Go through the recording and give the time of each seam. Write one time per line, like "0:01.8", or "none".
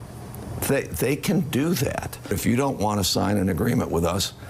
0:02.4